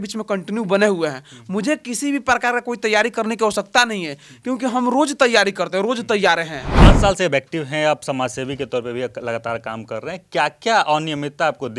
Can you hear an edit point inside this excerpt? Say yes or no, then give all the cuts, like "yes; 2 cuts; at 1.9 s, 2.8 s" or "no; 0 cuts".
yes; 1 cut; at 6.6 s